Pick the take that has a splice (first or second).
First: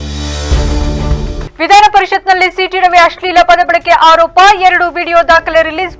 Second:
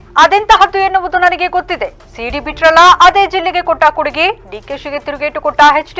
first